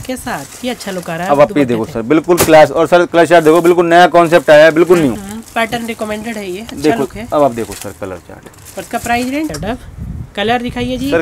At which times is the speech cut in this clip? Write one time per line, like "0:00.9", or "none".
0:09.5

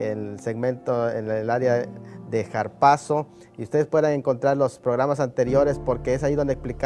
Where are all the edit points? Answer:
none

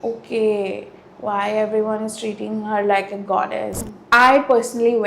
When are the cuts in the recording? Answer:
0:03.7

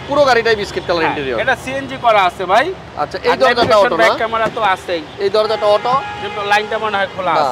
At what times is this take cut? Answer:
none

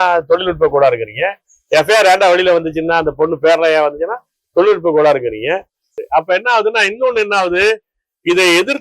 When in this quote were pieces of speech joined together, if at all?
0:05.9

